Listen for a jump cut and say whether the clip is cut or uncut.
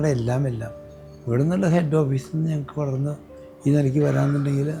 uncut